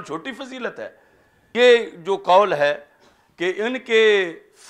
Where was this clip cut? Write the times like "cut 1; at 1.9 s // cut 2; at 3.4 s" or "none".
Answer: cut 1; at 1.5 s